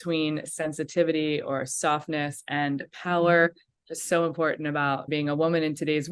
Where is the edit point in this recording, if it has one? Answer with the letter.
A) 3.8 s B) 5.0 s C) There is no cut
B